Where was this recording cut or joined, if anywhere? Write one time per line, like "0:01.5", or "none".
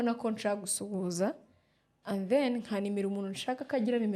none